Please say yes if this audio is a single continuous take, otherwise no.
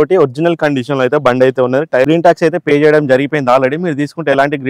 no